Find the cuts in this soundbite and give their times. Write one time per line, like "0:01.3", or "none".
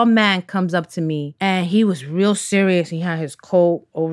none